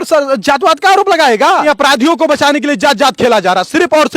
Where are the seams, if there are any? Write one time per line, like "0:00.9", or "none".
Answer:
0:01.6